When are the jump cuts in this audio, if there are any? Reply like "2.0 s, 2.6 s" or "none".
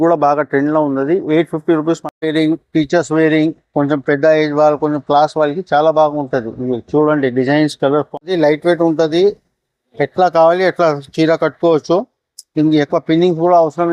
2.1 s, 8.2 s